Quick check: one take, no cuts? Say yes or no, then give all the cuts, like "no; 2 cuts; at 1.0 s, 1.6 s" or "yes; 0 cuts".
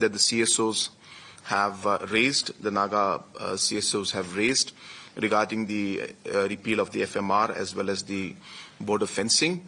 yes; 0 cuts